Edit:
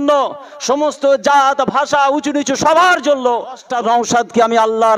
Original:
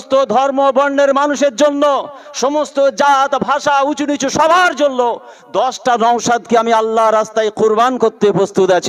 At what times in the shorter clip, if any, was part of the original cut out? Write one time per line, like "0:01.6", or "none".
0:03.6

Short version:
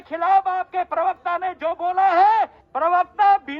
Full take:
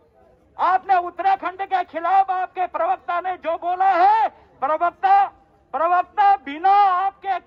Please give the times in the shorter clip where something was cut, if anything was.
0:02.6

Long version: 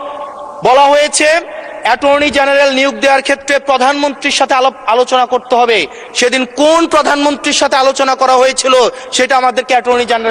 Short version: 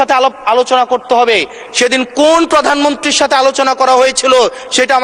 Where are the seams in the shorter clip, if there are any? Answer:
none

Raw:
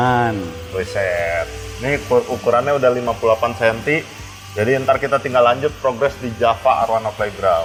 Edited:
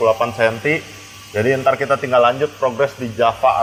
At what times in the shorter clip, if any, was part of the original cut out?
none

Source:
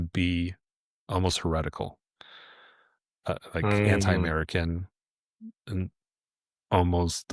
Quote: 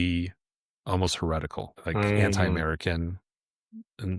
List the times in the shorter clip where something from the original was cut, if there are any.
0:01.8

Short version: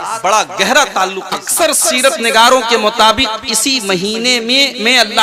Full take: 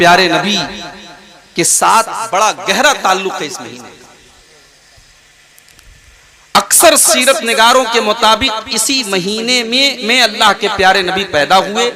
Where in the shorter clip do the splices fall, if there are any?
0:01.4

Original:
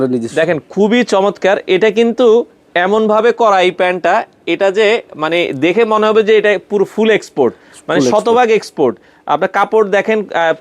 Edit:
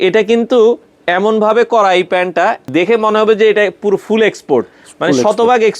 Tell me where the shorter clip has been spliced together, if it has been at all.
0:02.6

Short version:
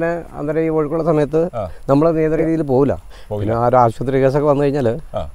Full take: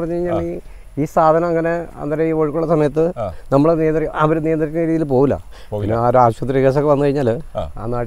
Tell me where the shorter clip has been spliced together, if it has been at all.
0:02.4

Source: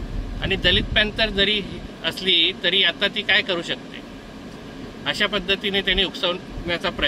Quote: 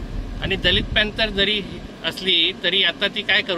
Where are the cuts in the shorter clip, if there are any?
none

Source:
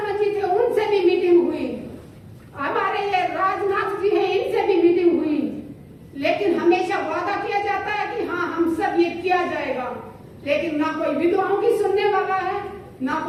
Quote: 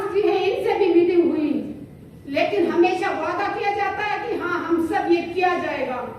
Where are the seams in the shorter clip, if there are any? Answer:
none

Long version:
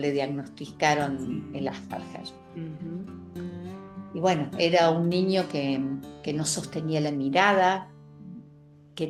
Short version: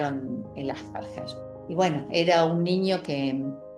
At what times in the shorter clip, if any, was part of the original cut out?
0:01.5

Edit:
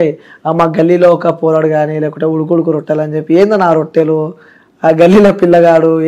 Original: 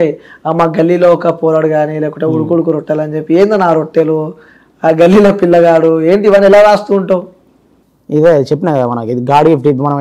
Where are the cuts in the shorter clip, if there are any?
none

